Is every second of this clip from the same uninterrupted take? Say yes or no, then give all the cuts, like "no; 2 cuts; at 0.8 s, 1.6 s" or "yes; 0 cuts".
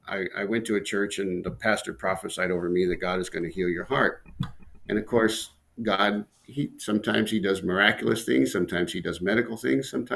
yes; 0 cuts